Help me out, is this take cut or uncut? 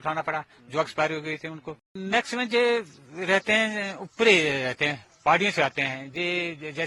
cut